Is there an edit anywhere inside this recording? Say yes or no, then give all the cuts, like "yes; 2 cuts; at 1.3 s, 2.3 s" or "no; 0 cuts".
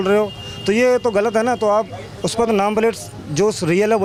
no; 0 cuts